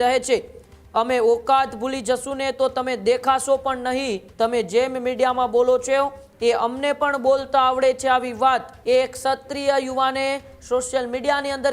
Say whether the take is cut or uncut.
cut